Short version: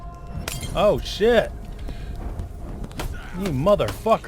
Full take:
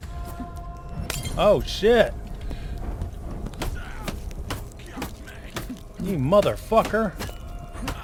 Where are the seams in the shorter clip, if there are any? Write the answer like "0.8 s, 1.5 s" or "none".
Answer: 3.3 s